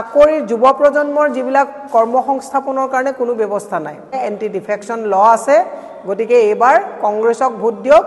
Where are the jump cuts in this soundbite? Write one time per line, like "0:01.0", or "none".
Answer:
0:04.1